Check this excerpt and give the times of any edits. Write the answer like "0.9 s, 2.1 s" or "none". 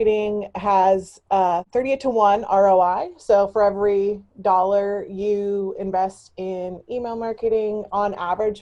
1.7 s